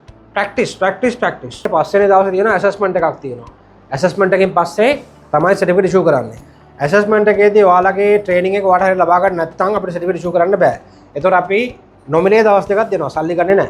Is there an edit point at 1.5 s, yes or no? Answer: yes